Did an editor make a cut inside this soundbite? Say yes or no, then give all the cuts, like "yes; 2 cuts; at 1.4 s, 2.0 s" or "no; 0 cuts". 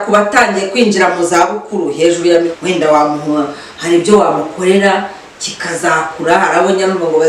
yes; 1 cut; at 2.5 s